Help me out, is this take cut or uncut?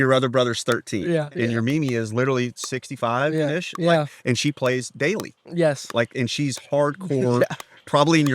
cut